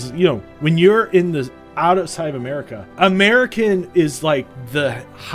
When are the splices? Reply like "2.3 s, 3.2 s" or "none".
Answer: 2.9 s